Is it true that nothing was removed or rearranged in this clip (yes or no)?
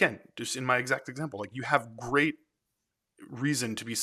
yes